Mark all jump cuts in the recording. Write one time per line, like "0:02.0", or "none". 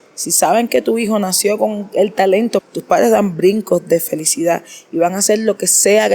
0:02.6
0:04.0